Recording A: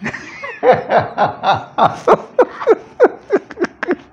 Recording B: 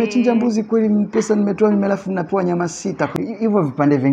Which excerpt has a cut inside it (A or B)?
B